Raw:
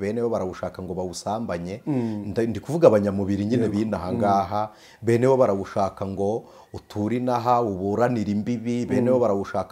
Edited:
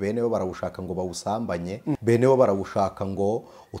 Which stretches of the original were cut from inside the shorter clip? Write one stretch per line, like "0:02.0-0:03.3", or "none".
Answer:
0:02.0-0:05.0